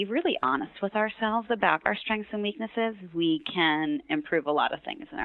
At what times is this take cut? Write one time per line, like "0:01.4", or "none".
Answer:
none